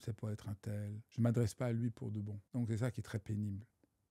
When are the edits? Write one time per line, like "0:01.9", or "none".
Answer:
0:01.0
0:02.4